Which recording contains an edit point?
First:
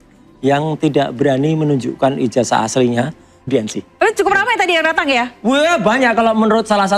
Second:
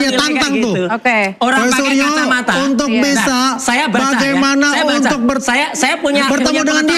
first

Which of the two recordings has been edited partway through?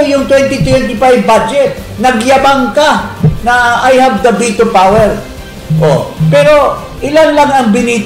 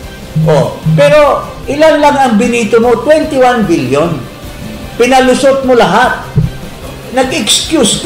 second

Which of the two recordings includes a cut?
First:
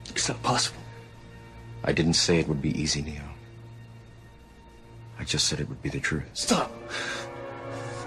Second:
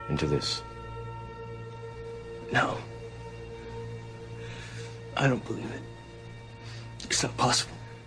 first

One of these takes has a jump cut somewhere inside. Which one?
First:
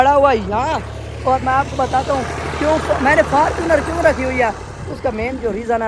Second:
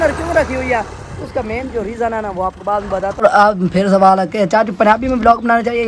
second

